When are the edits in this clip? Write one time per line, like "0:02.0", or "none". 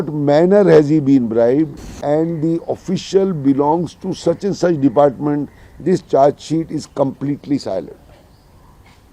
0:01.9